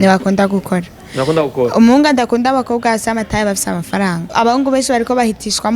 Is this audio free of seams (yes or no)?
no